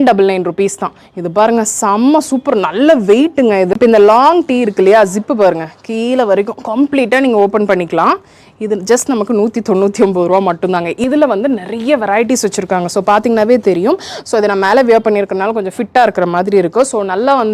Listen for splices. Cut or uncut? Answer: cut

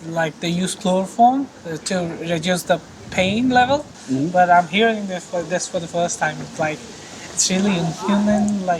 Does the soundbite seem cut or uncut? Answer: cut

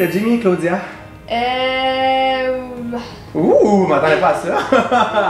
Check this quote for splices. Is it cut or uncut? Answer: uncut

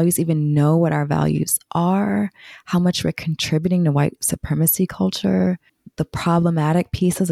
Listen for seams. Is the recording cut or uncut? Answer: cut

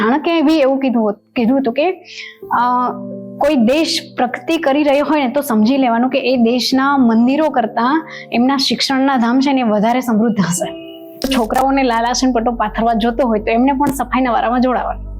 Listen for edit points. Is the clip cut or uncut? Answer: cut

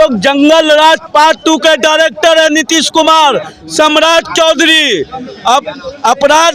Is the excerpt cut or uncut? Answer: uncut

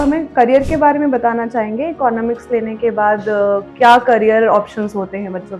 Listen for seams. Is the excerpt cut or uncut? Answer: uncut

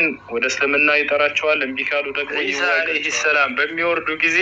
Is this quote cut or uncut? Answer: cut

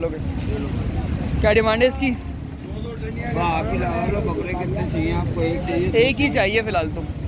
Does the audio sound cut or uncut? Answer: uncut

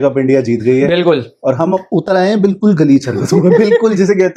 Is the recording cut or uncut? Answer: uncut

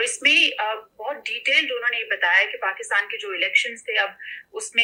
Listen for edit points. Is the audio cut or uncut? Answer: uncut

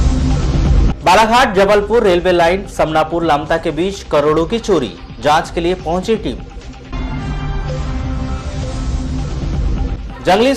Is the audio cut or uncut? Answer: cut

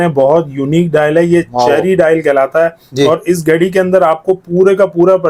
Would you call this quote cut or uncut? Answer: uncut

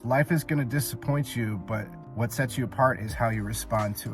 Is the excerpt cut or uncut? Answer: cut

